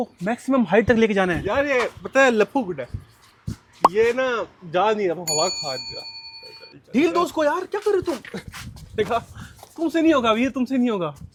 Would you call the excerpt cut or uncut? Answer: uncut